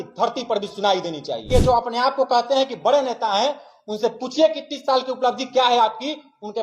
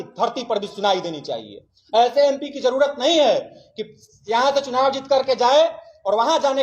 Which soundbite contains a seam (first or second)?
first